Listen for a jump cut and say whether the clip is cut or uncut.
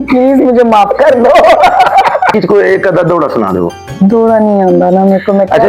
cut